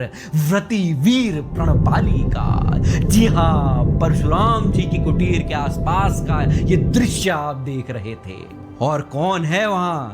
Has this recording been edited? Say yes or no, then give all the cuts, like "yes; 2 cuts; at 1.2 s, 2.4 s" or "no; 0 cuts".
no; 0 cuts